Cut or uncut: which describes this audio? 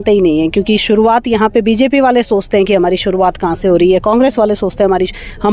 uncut